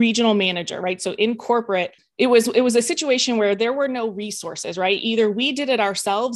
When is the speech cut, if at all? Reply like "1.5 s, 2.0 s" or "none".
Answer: 2.0 s